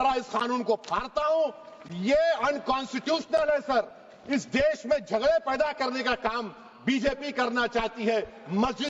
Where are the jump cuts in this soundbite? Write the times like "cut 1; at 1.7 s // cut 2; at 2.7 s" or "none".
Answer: none